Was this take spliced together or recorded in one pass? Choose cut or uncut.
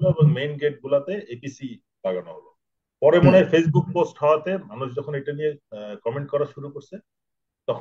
uncut